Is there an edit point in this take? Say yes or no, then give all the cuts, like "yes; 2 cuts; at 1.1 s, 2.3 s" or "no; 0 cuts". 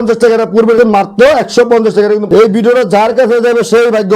yes; 2 cuts; at 0.8 s, 2.2 s